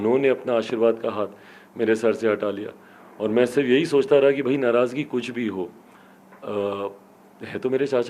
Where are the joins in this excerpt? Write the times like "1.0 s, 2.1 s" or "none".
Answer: none